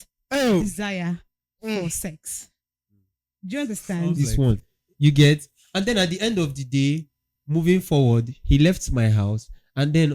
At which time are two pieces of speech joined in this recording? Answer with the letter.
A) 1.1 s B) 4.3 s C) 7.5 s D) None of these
B